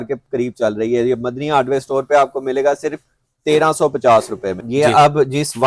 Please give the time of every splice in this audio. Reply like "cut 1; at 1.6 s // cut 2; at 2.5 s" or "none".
cut 1; at 4.6 s